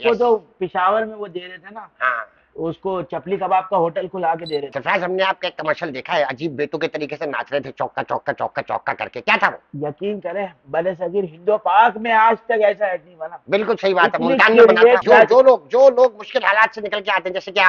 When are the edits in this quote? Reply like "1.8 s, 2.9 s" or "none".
4.7 s, 15.0 s